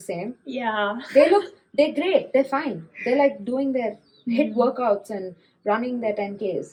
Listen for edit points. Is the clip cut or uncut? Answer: uncut